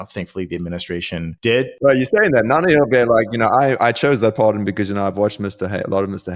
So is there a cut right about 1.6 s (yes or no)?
yes